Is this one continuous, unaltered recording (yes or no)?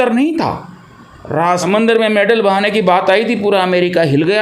no